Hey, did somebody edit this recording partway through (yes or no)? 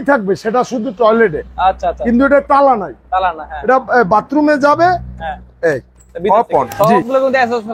yes